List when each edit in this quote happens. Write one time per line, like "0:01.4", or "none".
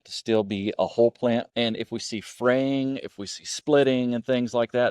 0:01.5